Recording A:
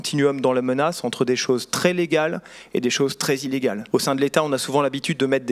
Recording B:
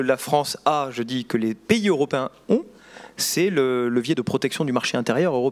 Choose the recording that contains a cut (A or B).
A